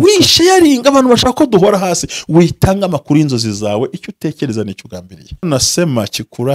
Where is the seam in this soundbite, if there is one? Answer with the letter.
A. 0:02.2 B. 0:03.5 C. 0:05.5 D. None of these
C